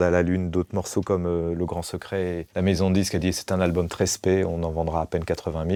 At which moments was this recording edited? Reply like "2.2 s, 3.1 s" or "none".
none